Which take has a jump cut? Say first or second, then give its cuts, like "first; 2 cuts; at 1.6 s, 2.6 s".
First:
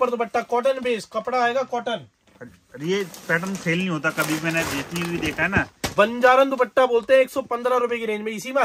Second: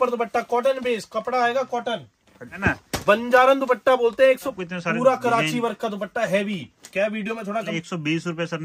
second; 3 cuts; at 2.5 s, 4.5 s, 7.7 s